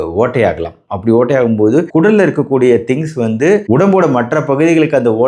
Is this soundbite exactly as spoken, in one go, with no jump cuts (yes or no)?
yes